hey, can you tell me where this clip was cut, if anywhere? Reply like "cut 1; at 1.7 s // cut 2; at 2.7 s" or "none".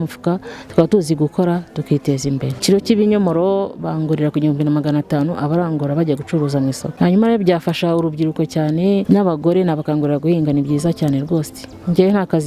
cut 1; at 2.6 s // cut 2; at 6.9 s // cut 3; at 9.0 s